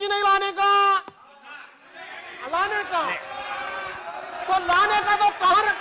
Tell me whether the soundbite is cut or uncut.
uncut